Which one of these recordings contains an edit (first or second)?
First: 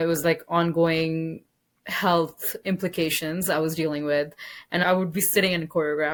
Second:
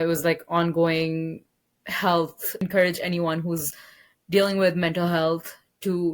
second